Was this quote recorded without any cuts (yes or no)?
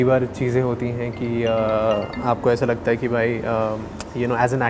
yes